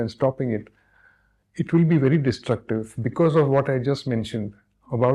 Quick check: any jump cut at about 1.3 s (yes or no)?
no